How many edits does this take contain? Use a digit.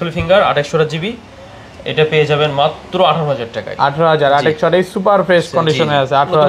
0